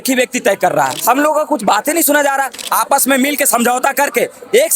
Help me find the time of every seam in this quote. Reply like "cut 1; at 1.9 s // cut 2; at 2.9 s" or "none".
cut 1; at 1.0 s // cut 2; at 2.6 s